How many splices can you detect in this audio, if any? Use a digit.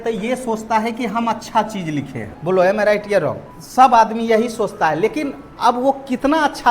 2